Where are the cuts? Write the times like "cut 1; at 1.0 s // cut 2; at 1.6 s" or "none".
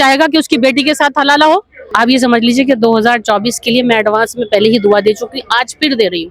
cut 1; at 1.8 s